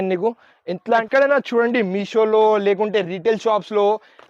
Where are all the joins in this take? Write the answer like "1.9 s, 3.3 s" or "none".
1.0 s